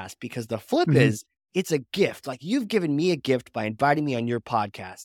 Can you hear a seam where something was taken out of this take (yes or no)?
no